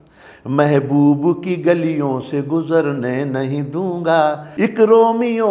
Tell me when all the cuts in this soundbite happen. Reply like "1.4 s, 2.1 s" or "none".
4.5 s